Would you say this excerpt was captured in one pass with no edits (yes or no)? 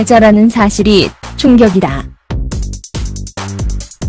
no